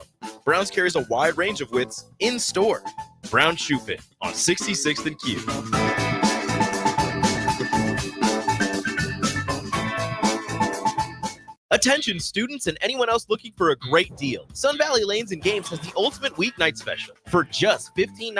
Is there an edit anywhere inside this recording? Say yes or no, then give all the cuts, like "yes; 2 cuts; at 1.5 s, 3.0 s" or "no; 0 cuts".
yes; 1 cut; at 11.5 s